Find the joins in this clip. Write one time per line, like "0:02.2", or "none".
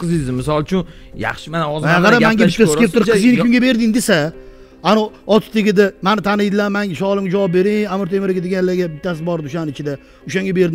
none